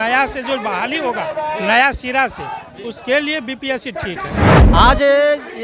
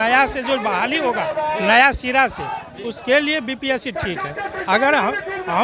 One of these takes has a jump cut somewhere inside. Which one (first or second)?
first